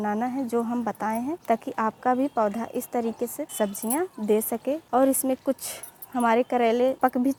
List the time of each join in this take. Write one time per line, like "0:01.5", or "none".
none